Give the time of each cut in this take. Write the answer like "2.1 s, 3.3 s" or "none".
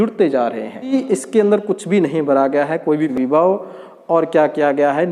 0.9 s, 3.1 s

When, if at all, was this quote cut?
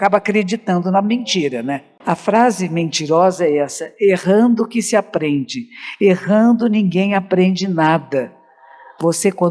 1.9 s

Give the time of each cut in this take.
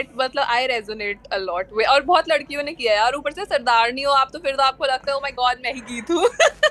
none

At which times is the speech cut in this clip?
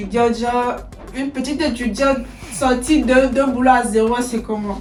none

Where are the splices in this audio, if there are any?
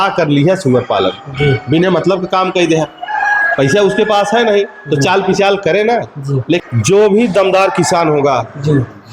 6.6 s

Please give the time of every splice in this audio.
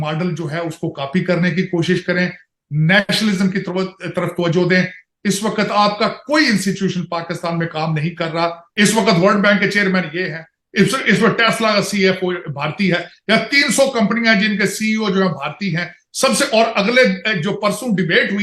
8.6 s

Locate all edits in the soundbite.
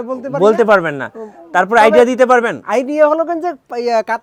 none

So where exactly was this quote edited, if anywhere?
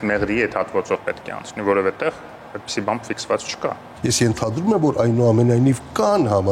3.9 s

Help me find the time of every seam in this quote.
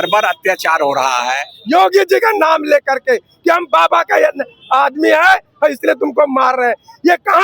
1.5 s

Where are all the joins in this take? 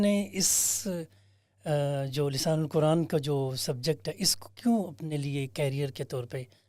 none

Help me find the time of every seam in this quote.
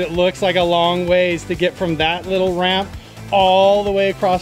none

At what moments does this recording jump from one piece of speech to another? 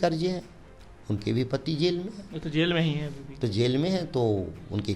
none

